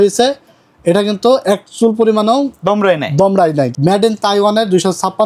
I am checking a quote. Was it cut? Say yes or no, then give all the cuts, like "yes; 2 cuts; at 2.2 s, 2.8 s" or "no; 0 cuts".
yes; 1 cut; at 3.7 s